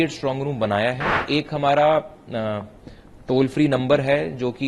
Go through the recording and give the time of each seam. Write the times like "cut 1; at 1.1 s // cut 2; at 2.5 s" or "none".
cut 1; at 1.2 s